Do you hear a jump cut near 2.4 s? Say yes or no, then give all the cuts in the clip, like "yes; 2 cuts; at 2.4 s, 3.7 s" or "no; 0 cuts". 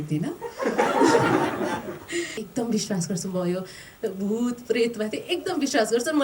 yes; 1 cut; at 2.4 s